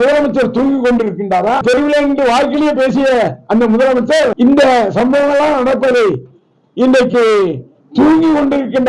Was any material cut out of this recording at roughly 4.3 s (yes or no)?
yes